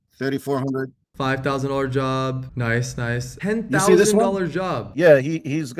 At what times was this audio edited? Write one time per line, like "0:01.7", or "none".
0:03.3